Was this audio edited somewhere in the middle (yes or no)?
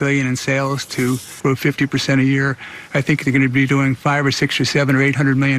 yes